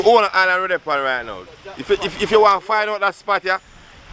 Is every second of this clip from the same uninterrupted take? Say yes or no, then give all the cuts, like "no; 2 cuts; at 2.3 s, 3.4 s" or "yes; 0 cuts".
yes; 0 cuts